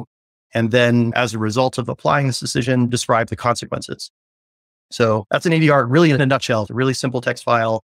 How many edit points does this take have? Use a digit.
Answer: 2